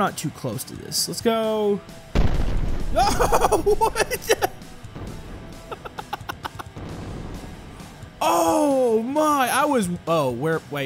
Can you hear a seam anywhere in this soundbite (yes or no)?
no